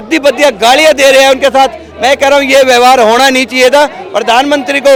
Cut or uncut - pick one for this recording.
uncut